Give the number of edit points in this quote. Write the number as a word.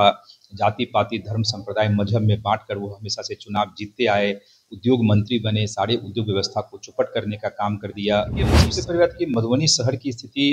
one